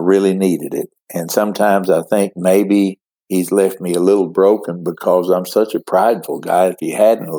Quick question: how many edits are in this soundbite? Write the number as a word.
zero